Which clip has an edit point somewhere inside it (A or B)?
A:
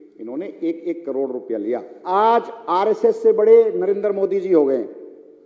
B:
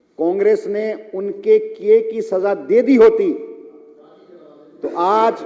A